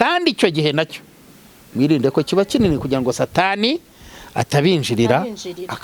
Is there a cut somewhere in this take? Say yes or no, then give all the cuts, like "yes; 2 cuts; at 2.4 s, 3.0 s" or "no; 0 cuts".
no; 0 cuts